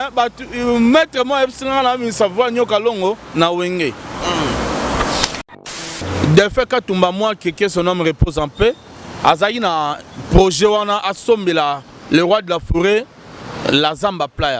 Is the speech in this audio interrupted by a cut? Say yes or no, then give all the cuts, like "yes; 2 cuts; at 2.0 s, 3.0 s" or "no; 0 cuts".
yes; 1 cut; at 5.5 s